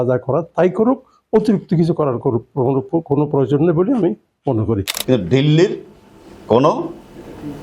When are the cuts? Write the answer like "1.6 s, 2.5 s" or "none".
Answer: 4.9 s